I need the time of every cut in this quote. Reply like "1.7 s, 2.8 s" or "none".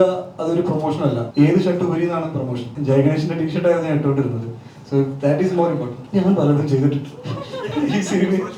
1.2 s, 2.7 s, 5.9 s